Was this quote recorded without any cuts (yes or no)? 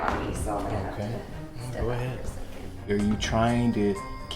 no